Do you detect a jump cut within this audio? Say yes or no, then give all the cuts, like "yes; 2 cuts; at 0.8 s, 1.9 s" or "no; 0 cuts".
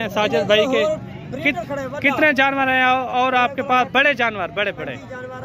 no; 0 cuts